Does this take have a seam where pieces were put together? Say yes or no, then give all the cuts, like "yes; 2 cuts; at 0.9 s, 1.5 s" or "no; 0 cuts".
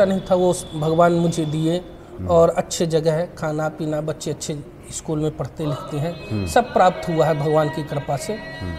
no; 0 cuts